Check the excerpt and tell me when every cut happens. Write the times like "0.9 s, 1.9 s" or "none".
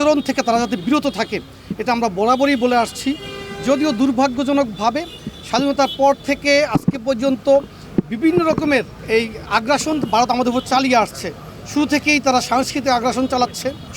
none